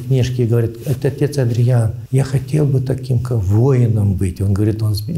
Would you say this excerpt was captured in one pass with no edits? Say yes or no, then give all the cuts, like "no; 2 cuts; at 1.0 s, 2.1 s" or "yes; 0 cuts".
no; 1 cut; at 2.0 s